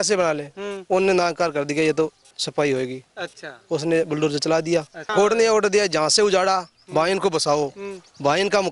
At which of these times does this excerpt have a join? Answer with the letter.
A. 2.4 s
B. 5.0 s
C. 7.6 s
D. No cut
B